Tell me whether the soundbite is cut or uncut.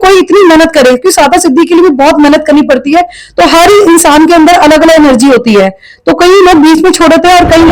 uncut